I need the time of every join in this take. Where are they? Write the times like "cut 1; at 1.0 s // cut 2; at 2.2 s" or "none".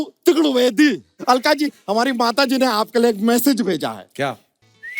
cut 1; at 1.1 s